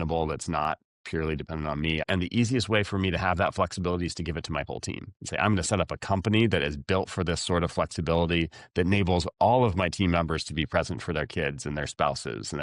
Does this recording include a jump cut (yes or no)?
yes